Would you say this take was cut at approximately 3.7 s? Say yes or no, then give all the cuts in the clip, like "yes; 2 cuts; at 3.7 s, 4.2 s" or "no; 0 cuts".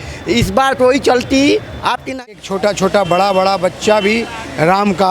no; 1 cut; at 2.3 s